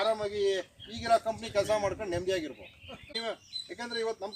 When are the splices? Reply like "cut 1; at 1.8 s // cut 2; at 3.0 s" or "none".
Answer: cut 1; at 3.2 s